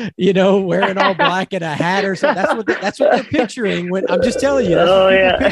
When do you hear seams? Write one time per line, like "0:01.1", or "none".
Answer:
none

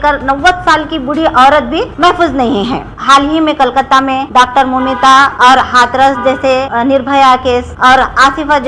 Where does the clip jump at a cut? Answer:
0:01.9
0:02.9
0:04.2
0:05.3
0:06.7
0:07.7

